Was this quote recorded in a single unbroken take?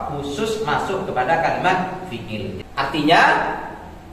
no; 1 cut; at 2.6 s

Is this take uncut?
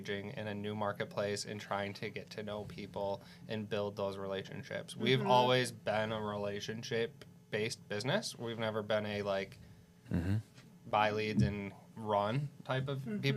yes; 0 cuts

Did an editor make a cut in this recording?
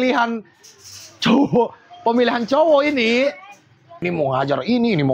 yes; 1 cut; at 3.9 s

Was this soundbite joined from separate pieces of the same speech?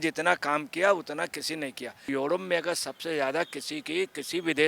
yes; 1 cut; at 2.1 s

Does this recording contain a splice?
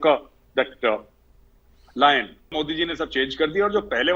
yes; 1 cut; at 2.5 s

